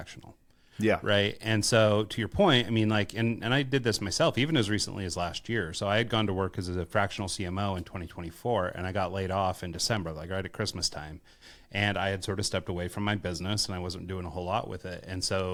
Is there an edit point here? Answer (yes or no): no